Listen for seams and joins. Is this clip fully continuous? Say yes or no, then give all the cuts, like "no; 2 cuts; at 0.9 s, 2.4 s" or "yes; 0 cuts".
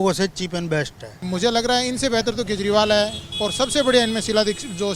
no; 1 cut; at 1.2 s